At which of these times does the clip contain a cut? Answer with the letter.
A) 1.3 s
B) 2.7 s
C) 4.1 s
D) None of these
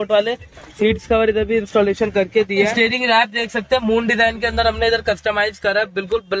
B